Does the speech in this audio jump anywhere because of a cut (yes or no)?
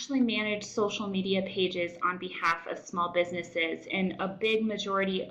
no